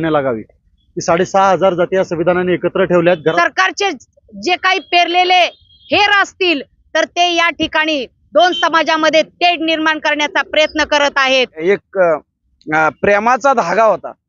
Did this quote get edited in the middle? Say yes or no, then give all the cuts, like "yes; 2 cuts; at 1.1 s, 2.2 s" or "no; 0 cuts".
yes; 2 cuts; at 3.2 s, 11.5 s